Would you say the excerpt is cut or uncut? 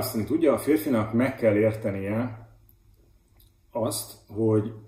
uncut